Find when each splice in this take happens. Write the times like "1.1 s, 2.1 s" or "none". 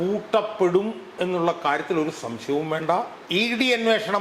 3.2 s